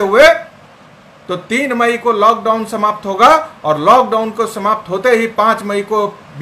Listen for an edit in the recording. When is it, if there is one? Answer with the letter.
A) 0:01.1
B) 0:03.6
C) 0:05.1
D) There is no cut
D